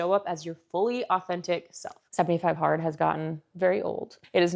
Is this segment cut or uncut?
cut